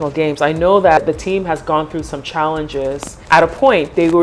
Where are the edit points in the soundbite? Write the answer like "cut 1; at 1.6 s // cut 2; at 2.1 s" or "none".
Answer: cut 1; at 1.0 s // cut 2; at 3.1 s